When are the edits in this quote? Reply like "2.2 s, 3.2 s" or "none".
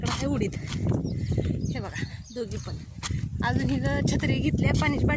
none